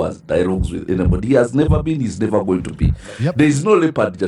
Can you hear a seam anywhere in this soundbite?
no; 0 cuts

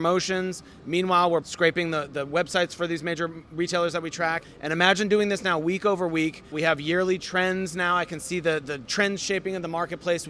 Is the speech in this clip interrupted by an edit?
yes; 4 cuts; at 1.4 s, 4.5 s, 6.5 s, 8.8 s

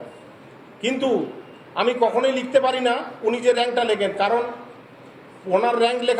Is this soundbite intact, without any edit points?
yes; 0 cuts

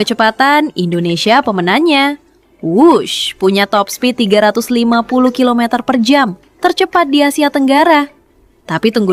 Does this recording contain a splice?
no; 0 cuts

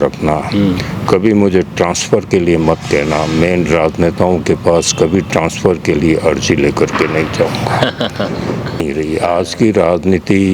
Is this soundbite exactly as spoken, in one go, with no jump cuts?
no; 1 cut; at 8.8 s

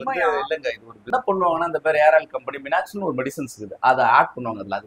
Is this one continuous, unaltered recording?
no; 1 cut; at 1.1 s

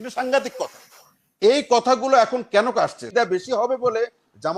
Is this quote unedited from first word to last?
no; 1 cut; at 3.0 s

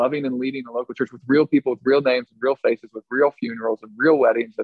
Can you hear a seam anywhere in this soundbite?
no; 0 cuts

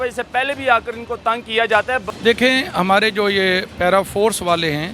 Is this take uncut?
no; 1 cut; at 2.0 s

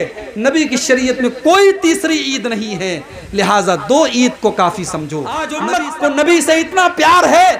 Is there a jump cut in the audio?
yes; 1 cut; at 5.5 s

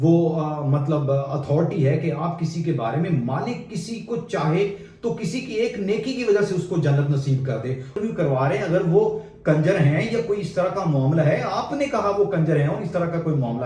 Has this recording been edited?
yes; 1 cut; at 8.0 s

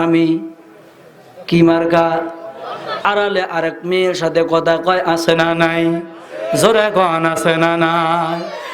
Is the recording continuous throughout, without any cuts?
no; 1 cut; at 3.1 s

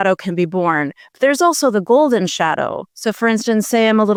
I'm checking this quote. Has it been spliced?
no; 0 cuts

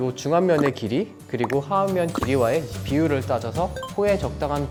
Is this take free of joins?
yes; 0 cuts

